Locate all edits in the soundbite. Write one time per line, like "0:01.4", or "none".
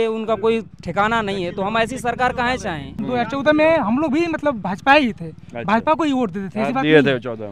0:03.0

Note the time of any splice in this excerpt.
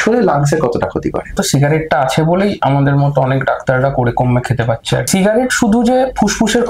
0:01.3
0:05.1

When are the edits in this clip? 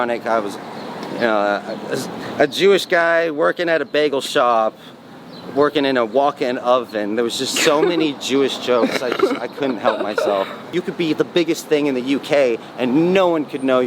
0:10.7

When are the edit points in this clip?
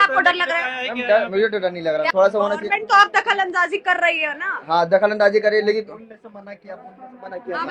0:02.1

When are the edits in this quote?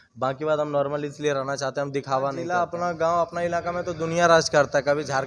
0:02.6

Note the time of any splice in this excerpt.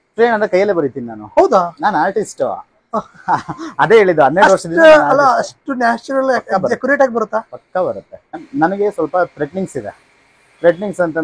0:08.4

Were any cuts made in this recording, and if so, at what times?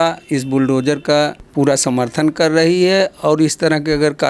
0:01.4

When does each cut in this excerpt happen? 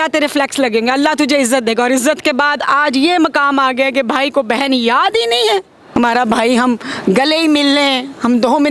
0:05.8

